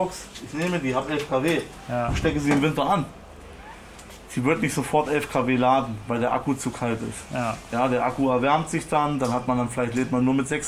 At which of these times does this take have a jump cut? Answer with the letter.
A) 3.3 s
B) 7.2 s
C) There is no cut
C